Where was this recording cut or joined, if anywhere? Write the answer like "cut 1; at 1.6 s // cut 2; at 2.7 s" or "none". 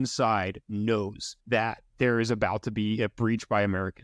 cut 1; at 1.6 s

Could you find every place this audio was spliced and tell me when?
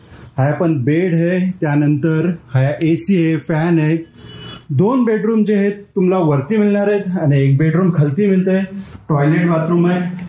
none

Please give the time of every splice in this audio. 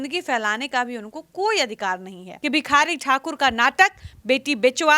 cut 1; at 2.3 s

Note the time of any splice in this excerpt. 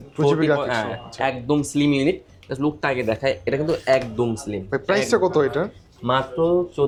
none

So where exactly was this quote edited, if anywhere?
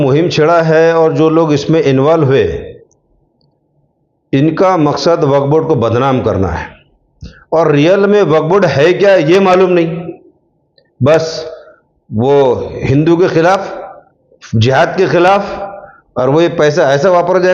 none

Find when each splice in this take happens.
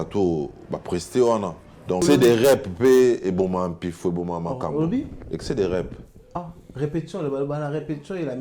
cut 1; at 2.0 s

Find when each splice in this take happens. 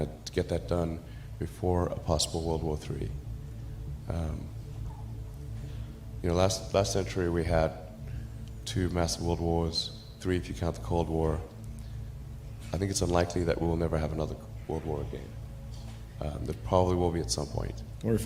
cut 1; at 4.7 s // cut 2; at 6.2 s

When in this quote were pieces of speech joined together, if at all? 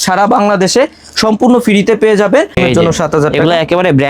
cut 1; at 2.5 s

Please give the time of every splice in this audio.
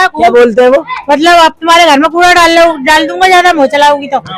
none

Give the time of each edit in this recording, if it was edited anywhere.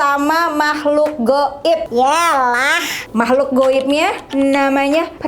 none

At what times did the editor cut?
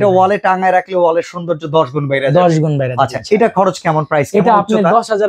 none

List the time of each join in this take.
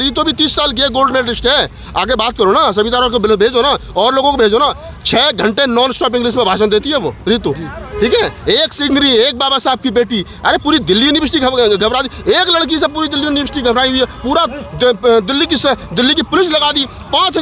none

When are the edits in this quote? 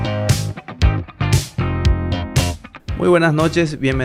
none

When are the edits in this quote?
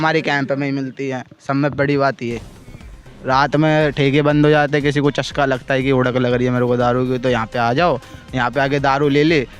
none

